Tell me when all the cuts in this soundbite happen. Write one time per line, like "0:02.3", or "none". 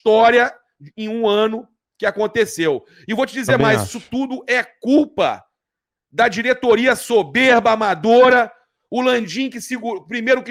none